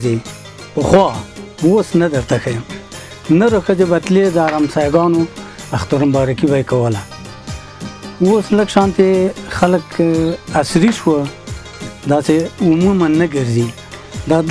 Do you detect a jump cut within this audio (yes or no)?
no